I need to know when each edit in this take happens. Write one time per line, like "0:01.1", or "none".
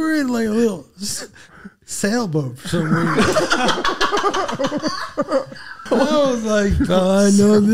0:05.8